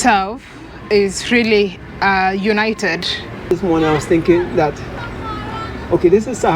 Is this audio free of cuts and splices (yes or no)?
no